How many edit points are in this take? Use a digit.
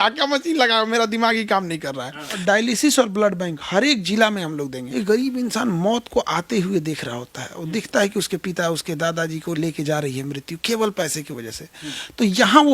2